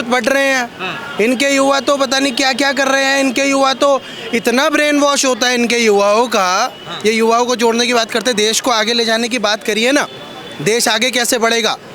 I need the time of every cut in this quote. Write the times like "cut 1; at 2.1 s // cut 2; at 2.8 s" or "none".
none